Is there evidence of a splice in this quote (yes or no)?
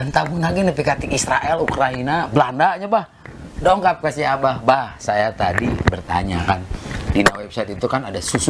no